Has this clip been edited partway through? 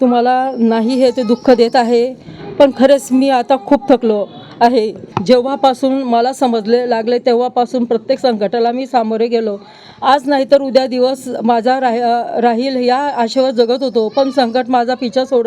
yes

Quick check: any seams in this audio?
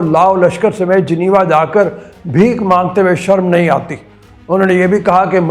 no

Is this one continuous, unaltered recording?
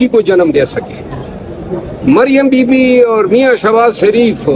yes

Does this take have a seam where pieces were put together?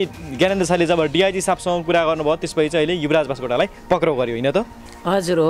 no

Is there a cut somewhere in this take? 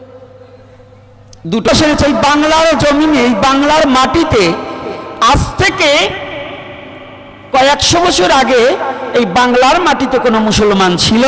yes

